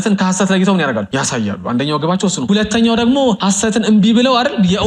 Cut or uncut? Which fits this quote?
cut